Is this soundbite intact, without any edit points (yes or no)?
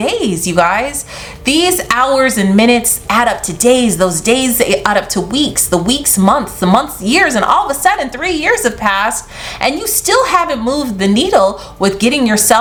yes